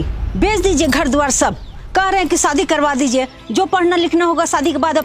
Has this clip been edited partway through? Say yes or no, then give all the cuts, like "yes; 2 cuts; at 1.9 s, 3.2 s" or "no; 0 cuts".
no; 0 cuts